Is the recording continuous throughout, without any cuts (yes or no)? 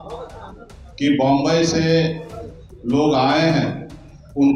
yes